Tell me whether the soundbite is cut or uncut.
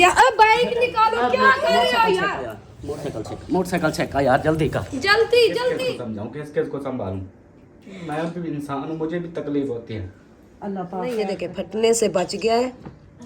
cut